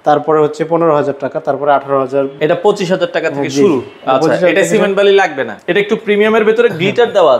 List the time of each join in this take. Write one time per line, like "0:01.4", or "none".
0:02.4
0:05.5